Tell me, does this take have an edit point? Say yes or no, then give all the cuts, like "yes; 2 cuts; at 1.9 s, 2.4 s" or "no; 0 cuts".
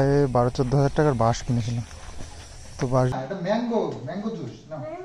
yes; 1 cut; at 3.2 s